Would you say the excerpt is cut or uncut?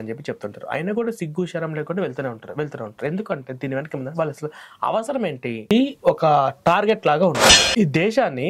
cut